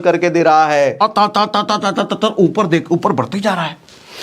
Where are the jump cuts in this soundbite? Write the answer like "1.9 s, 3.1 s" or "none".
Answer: 1.0 s